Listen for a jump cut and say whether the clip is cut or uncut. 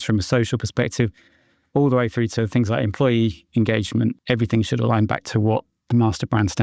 cut